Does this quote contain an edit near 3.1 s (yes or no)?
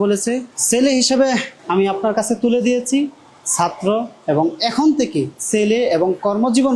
no